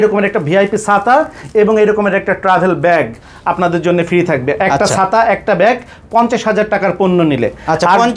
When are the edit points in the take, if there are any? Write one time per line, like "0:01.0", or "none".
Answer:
none